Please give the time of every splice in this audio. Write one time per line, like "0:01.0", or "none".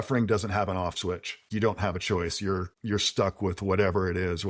0:01.5
0:02.7